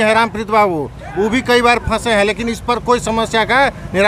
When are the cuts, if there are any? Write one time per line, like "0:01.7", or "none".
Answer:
none